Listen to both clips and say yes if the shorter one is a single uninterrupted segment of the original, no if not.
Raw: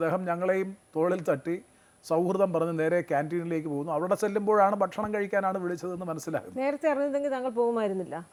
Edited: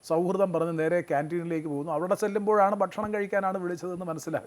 yes